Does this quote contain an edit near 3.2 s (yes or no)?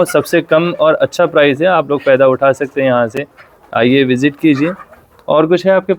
no